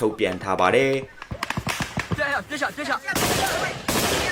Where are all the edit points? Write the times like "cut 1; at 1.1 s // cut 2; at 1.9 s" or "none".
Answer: none